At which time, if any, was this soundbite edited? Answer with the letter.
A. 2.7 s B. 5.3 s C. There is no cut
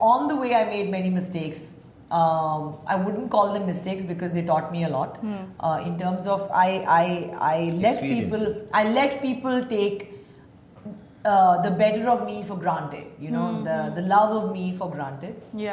C